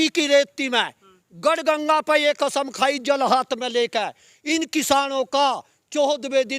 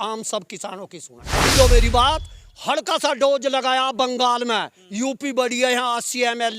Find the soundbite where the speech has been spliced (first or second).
second